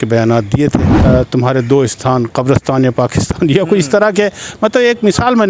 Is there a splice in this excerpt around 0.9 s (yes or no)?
yes